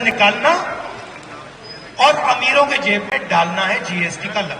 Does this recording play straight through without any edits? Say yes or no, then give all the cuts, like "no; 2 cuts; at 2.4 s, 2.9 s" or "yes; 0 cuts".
yes; 0 cuts